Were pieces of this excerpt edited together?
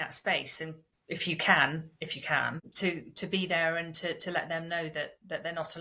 yes; 2 cuts; at 0.9 s, 2.6 s

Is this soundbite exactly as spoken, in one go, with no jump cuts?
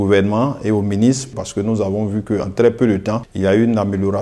no; 2 cuts; at 1.4 s, 3.3 s

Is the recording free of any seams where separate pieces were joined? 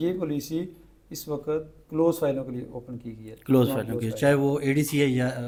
yes; 0 cuts

